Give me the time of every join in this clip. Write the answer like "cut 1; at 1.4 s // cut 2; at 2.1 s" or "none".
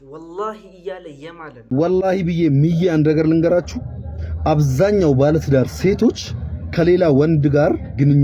cut 1; at 1.0 s